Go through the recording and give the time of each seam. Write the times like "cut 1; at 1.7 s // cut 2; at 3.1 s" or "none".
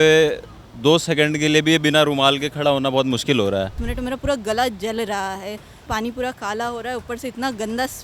cut 1; at 3.8 s // cut 2; at 5.9 s